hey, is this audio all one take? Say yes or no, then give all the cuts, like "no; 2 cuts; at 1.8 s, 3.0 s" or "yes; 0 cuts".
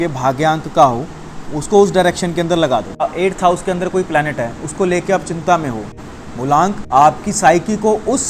no; 2 cuts; at 3.1 s, 6.5 s